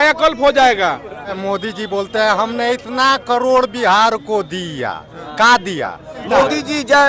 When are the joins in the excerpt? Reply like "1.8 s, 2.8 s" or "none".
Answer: 1.4 s, 6.2 s